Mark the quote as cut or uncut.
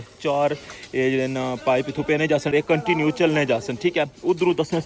cut